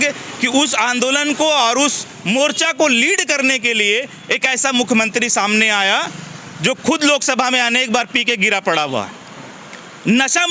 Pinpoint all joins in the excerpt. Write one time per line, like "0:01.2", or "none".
none